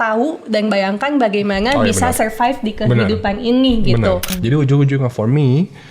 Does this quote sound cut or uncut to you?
cut